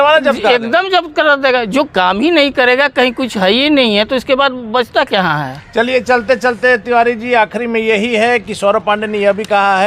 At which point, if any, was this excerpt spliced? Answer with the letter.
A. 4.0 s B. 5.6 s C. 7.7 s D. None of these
D